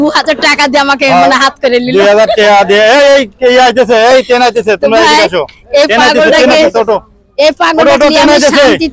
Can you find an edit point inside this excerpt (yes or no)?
no